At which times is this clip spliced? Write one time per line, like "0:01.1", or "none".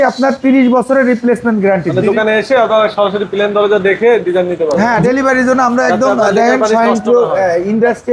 0:01.9
0:04.8